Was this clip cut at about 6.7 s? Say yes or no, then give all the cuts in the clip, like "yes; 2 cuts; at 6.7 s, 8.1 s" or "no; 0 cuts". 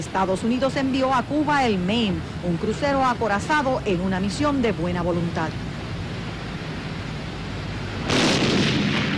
no; 1 cut; at 8.0 s